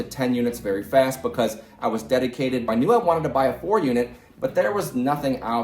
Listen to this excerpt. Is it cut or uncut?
cut